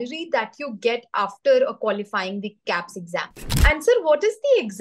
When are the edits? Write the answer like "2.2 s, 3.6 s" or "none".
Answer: 3.5 s